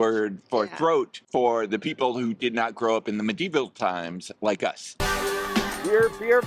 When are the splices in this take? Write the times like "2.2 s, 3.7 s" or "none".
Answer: 4.9 s